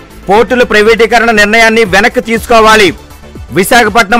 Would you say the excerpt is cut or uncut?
uncut